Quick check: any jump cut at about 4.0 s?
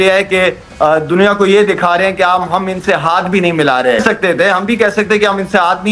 yes; 1 cut; at 4.0 s

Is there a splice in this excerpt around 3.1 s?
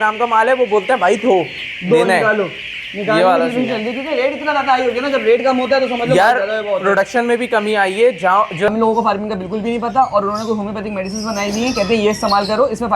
no; 1 cut; at 8.7 s

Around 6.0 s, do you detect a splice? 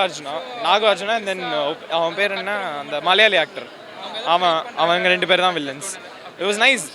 no; 0 cuts

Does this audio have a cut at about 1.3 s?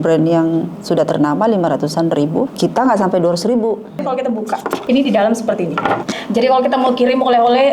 no; 3 cuts; at 2.5 s, 4.3 s, 6.1 s

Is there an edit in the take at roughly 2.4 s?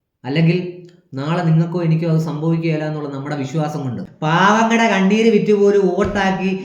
no; 1 cut; at 4.1 s

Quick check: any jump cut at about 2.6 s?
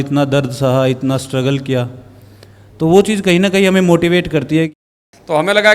no; 1 cut; at 4.7 s

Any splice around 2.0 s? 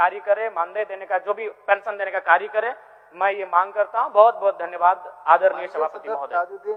no; 0 cuts

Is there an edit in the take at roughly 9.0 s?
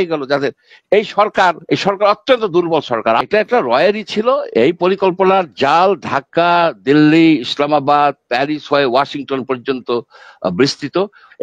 no; 1 cut; at 3.2 s

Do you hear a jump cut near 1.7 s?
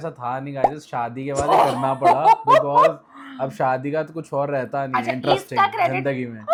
no; 0 cuts

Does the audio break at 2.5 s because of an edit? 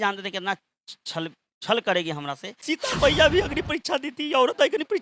yes; 1 cut; at 2.5 s

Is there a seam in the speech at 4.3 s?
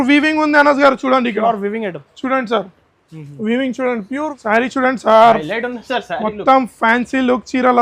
yes; 1 cut; at 4.3 s

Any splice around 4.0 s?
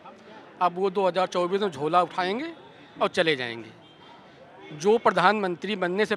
no; 0 cuts

